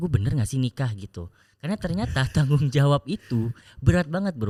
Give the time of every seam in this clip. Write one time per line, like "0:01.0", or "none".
none